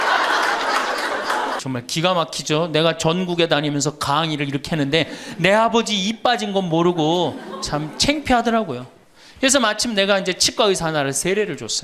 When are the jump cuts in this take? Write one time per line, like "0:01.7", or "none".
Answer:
0:01.6